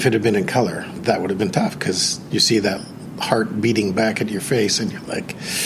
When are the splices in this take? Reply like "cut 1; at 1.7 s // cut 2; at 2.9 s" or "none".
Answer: cut 1; at 1.0 s